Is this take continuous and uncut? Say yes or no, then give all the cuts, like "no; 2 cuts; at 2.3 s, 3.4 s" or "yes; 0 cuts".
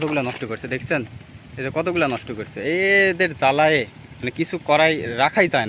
yes; 0 cuts